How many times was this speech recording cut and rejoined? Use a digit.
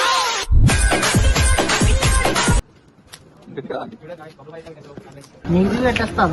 1